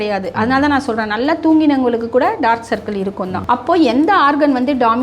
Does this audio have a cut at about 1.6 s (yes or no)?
no